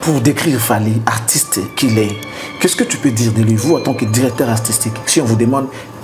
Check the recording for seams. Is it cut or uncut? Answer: uncut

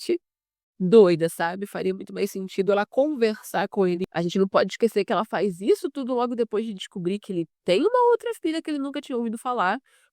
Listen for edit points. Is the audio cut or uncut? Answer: cut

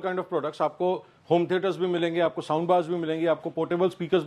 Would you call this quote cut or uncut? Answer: uncut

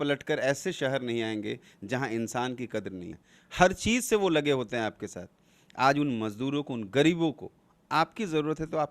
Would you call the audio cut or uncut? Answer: cut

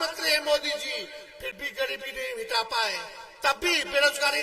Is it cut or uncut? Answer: uncut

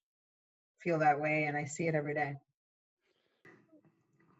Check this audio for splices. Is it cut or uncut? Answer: cut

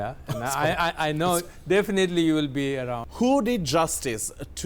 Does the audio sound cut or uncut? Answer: cut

